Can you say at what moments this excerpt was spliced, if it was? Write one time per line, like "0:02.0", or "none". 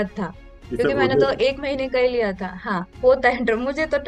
none